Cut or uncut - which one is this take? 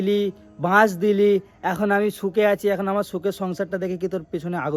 uncut